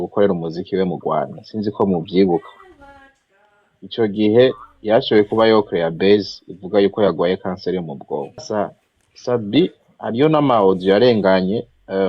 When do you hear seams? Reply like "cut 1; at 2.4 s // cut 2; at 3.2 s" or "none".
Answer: cut 1; at 8.5 s

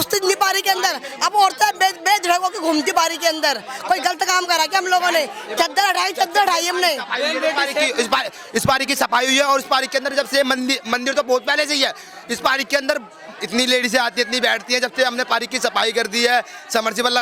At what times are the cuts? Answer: none

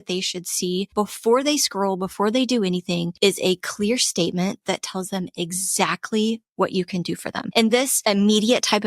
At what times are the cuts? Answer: cut 1; at 0.9 s // cut 2; at 3.1 s // cut 3; at 7.4 s // cut 4; at 7.9 s

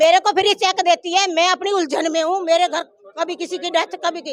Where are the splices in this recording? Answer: none

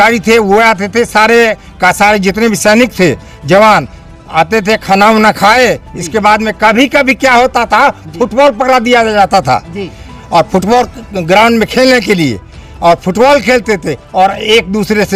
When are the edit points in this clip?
none

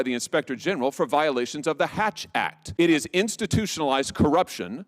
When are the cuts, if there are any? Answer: cut 1; at 2.6 s

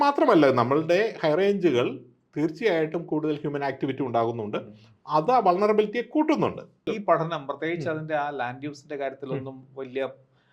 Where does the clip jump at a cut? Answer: cut 1; at 6.9 s

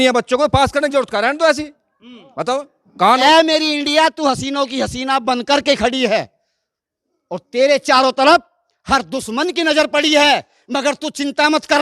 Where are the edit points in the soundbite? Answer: cut 1; at 3.2 s

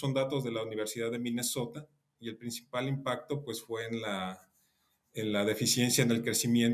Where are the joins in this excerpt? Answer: none

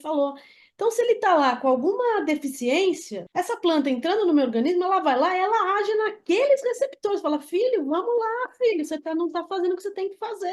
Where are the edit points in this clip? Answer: cut 1; at 3.1 s

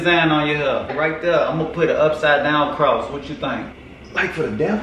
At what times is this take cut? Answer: cut 1; at 0.9 s

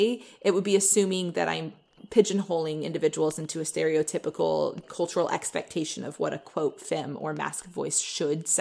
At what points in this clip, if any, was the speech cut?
cut 1; at 2.0 s // cut 2; at 4.9 s

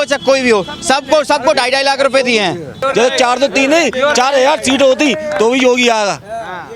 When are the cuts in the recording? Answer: cut 1; at 2.7 s

